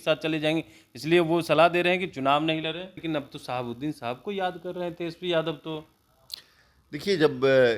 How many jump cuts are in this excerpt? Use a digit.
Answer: 1